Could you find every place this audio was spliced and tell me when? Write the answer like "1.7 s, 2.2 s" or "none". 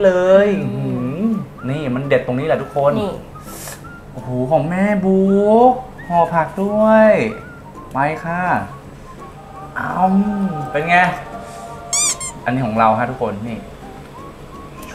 none